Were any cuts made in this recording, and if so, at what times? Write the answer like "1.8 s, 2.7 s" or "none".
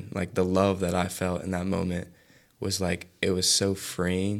none